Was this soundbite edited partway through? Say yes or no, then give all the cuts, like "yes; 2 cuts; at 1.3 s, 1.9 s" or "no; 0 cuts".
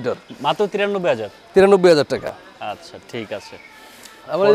no; 0 cuts